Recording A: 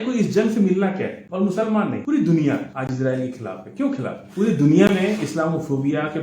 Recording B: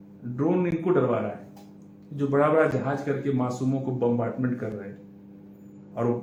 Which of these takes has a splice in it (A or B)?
A